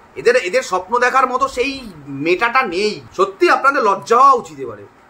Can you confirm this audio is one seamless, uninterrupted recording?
no; 1 cut; at 3.0 s

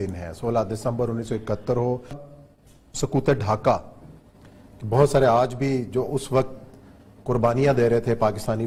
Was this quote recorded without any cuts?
yes; 0 cuts

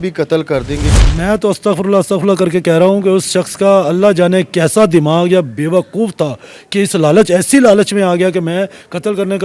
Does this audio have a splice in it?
yes; 1 cut; at 0.9 s

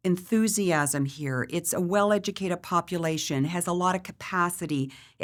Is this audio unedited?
yes; 0 cuts

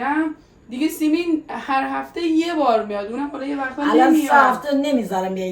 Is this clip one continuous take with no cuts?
yes; 0 cuts

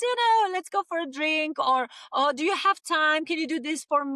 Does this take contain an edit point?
no; 0 cuts

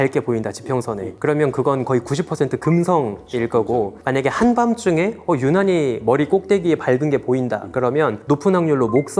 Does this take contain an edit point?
no; 0 cuts

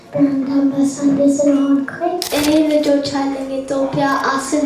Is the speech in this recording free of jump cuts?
no; 1 cut; at 2.3 s

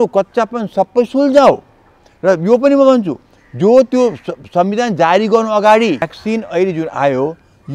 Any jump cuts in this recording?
yes; 1 cut; at 6.2 s

